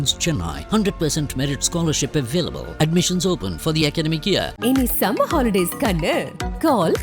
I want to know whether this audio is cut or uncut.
uncut